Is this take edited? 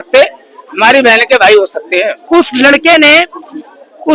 yes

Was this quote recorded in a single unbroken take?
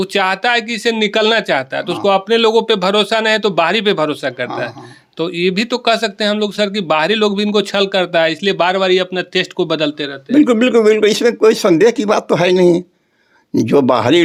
yes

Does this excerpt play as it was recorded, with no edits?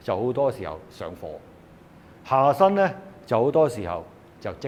yes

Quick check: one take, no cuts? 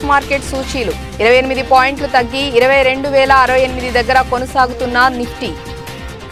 yes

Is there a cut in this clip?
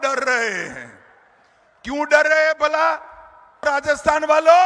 yes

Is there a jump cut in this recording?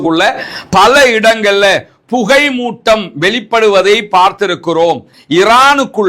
yes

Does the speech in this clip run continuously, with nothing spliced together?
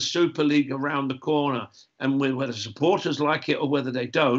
yes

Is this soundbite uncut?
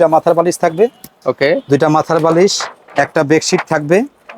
yes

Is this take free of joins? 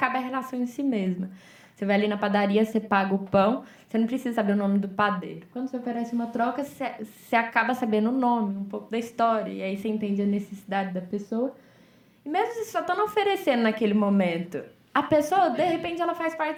yes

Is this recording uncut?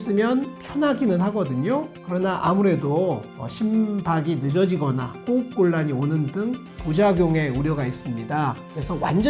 yes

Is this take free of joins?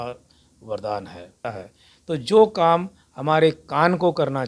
no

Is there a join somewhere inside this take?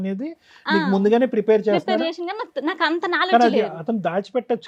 no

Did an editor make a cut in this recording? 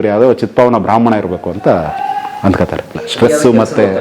yes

